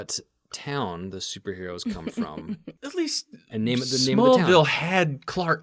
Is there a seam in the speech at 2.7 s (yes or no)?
yes